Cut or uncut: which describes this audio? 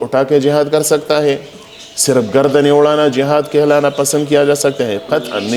uncut